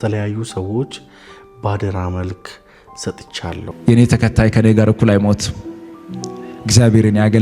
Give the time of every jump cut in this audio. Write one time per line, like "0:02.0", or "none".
0:03.7